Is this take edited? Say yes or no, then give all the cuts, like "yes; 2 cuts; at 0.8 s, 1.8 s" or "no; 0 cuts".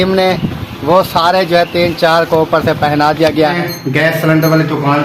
yes; 1 cut; at 3.6 s